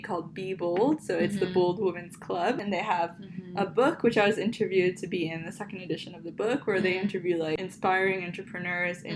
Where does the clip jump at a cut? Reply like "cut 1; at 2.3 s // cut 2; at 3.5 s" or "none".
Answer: cut 1; at 2.6 s // cut 2; at 7.6 s